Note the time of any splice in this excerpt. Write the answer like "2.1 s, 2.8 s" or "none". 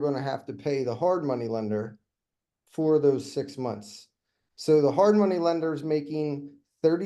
none